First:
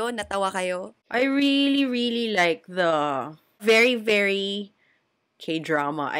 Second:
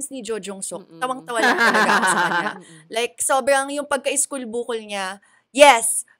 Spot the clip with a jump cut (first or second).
first